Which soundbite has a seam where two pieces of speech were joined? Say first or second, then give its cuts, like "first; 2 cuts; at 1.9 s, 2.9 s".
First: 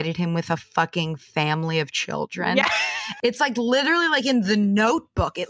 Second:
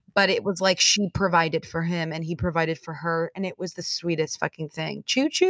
first; 1 cut; at 3.2 s